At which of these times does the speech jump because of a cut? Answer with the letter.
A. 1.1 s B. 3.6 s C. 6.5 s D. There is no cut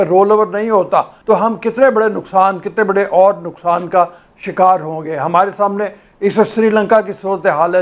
A